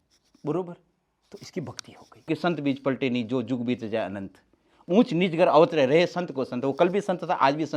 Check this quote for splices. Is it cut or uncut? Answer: cut